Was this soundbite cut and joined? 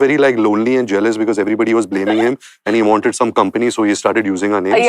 no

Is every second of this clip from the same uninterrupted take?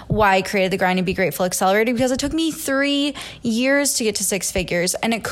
yes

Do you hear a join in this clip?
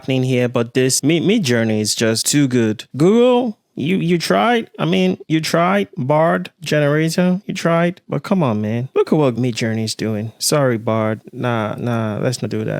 no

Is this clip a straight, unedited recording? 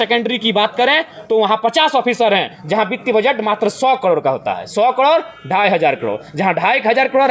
yes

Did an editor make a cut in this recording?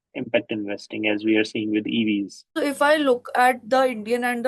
yes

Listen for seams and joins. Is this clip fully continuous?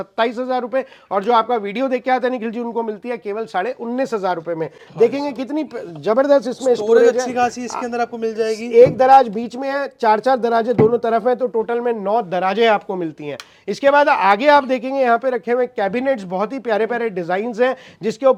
yes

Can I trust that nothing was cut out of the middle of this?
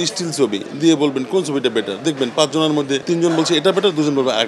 no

